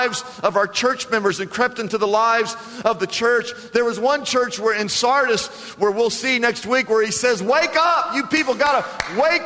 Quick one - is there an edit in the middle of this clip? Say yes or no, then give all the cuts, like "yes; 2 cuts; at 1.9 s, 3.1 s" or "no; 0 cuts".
no; 0 cuts